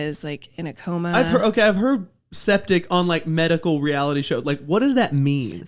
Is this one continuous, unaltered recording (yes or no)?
yes